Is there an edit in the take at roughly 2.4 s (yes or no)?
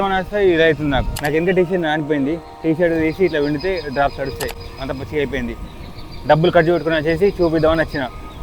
no